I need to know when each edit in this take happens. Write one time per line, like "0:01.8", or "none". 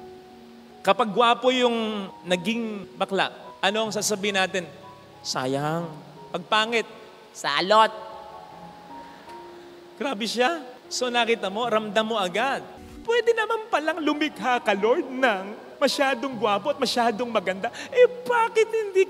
0:12.7